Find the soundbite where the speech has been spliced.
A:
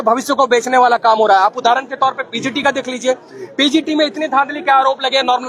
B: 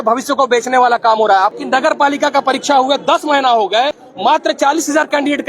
B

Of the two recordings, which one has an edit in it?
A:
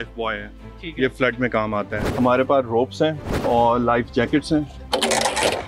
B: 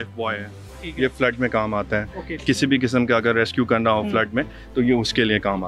A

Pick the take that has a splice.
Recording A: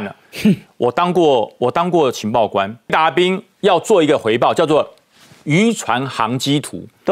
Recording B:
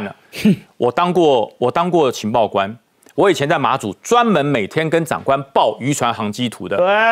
A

